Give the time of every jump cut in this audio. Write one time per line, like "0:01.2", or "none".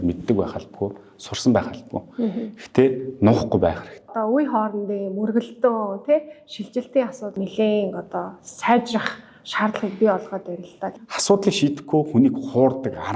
0:04.1
0:07.3
0:11.0

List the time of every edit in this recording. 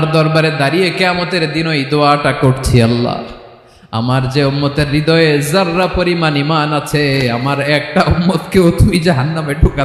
none

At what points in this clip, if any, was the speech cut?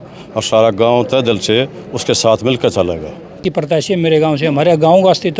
0:03.4

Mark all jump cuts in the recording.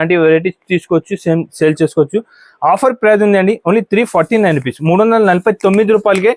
none

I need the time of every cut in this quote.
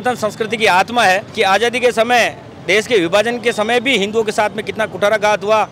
0:01.3

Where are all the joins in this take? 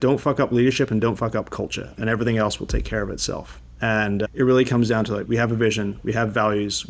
0:04.3
0:05.2

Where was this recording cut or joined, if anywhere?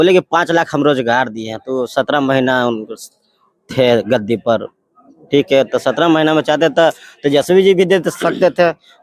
none

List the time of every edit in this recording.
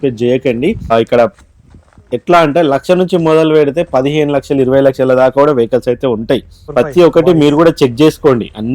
0:00.9
0:06.6

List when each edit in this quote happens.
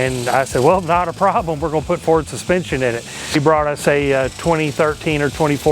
0:03.3

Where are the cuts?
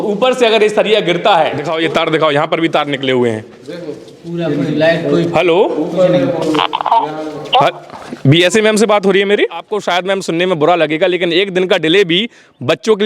0:01.7
0:09.7

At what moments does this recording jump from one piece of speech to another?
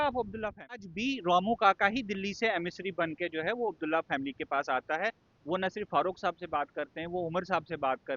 0:00.9

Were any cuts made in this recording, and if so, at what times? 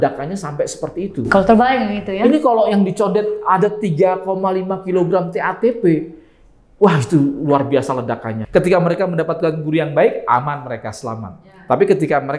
0:08.3

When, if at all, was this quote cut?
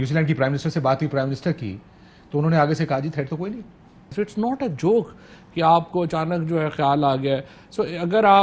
0:04.1

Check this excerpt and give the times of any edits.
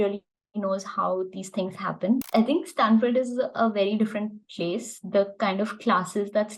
0:02.2

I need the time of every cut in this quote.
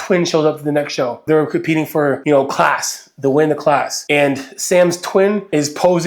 0:01.2

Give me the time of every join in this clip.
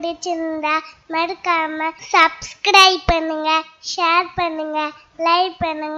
0:02.0

